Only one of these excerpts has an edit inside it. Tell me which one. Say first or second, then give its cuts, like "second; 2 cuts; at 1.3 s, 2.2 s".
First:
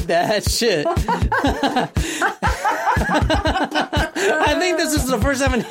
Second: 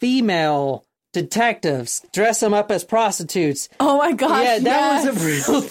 second; 2 cuts; at 0.9 s, 2.1 s